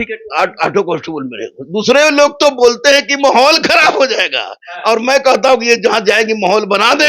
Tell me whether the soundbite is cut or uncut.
uncut